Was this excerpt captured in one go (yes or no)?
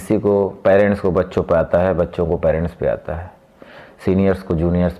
yes